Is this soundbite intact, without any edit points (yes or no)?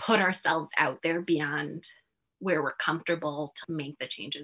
yes